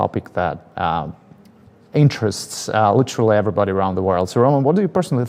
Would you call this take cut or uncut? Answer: uncut